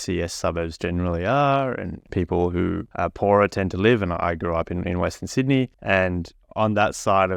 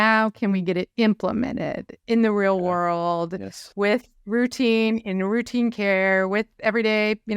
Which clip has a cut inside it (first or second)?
first